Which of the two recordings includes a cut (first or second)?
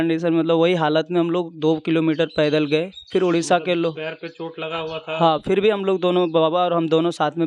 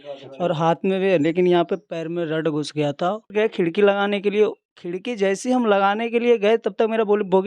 second